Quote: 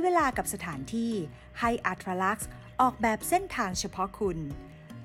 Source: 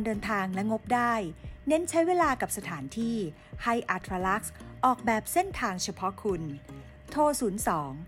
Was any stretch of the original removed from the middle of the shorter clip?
no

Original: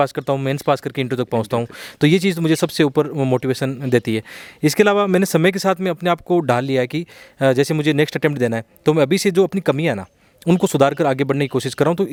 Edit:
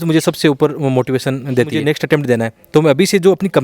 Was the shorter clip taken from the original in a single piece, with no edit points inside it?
no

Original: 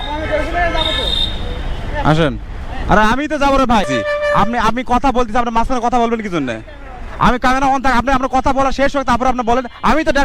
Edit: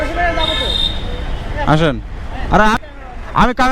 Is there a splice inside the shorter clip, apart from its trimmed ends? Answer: yes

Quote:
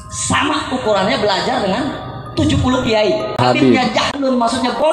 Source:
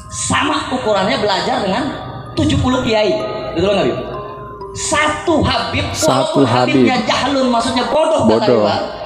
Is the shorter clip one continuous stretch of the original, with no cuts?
no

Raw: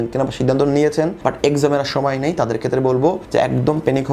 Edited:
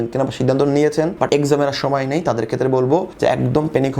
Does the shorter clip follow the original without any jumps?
no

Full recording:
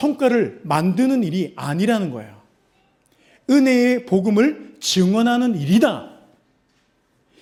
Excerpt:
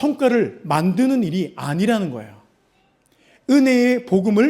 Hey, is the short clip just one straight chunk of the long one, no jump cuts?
yes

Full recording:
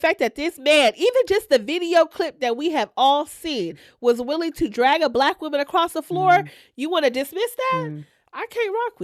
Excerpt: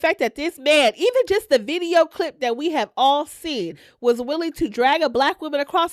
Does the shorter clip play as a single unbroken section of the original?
yes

